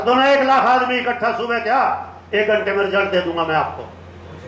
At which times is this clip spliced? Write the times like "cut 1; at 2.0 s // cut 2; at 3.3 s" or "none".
none